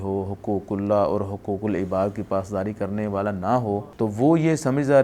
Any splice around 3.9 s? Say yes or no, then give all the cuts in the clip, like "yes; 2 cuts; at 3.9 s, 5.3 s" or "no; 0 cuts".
yes; 1 cut; at 3.9 s